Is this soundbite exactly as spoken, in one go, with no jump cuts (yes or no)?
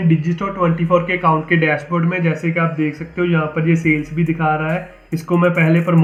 yes